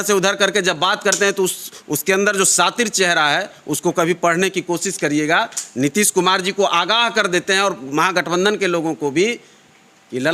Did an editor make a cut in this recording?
no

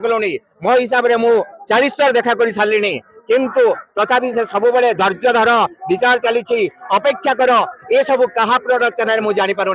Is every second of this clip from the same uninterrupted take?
yes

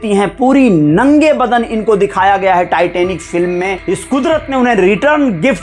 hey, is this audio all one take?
no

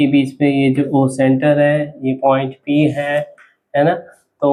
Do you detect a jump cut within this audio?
no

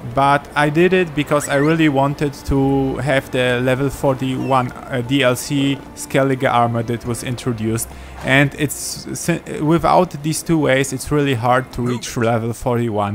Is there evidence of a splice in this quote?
no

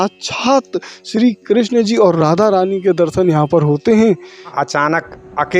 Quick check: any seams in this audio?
yes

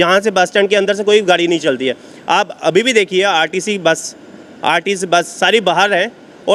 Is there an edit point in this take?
no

